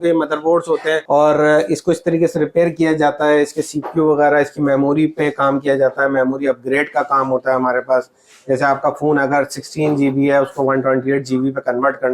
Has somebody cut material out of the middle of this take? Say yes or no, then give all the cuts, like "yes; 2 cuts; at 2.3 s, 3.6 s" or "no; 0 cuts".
yes; 1 cut; at 1.0 s